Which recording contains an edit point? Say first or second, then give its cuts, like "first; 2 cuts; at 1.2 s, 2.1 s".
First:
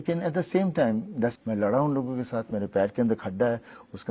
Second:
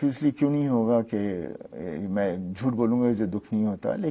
first; 1 cut; at 1.4 s